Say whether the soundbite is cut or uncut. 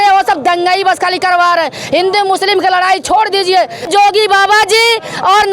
cut